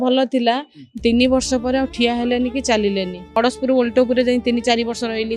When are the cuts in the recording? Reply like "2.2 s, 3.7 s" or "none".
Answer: 3.2 s